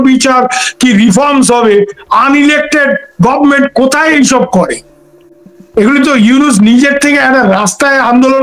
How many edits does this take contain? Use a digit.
0